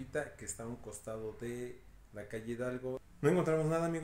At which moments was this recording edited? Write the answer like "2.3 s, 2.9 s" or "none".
3.1 s